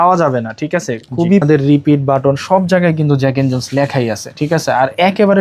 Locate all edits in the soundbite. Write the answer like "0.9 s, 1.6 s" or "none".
1.4 s